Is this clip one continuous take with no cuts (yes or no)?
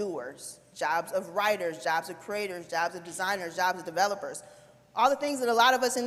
yes